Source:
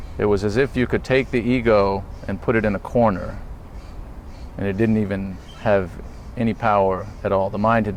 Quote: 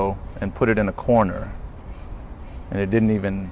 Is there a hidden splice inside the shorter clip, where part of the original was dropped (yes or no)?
no